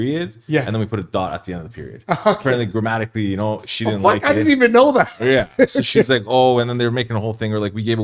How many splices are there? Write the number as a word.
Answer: zero